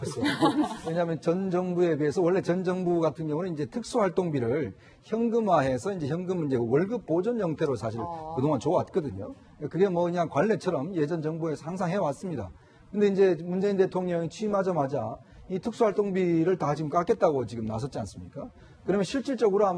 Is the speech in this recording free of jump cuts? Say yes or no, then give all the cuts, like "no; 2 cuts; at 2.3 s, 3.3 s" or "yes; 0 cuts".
no; 1 cut; at 1.2 s